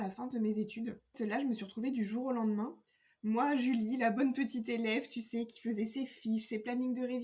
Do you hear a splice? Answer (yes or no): yes